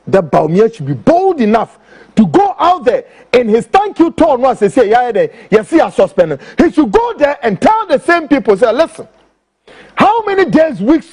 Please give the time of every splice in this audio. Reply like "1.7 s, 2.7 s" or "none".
none